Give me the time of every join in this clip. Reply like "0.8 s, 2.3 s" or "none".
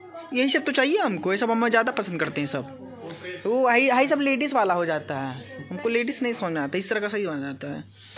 none